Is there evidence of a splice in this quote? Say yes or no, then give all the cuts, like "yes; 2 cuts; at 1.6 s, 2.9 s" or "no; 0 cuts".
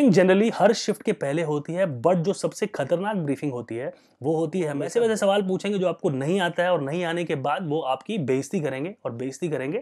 yes; 1 cut; at 4.9 s